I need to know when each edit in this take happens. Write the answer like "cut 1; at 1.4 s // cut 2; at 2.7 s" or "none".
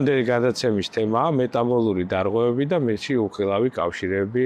none